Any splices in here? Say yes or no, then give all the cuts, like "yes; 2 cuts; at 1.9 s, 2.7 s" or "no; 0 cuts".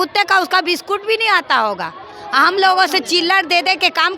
no; 0 cuts